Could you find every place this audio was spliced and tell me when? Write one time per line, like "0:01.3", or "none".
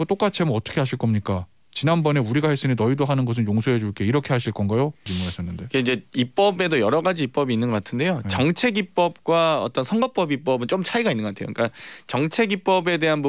0:05.0